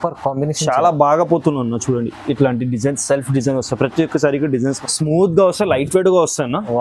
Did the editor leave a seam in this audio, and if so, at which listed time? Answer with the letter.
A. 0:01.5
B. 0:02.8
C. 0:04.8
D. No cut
C